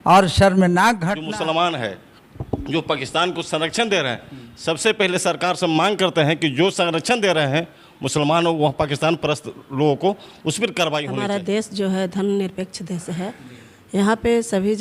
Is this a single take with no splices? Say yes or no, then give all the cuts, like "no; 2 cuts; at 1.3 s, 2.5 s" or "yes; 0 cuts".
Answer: no; 2 cuts; at 1.1 s, 11.1 s